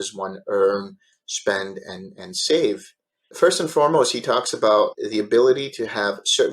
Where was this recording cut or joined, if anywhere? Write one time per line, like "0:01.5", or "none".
0:03.3
0:05.0